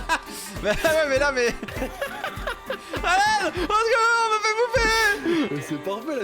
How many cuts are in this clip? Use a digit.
1